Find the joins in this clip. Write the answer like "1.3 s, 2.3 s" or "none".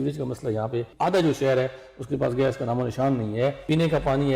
0.9 s, 3.6 s